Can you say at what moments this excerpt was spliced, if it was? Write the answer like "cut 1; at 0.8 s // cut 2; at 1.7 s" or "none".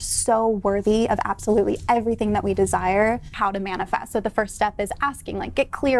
cut 1; at 3.3 s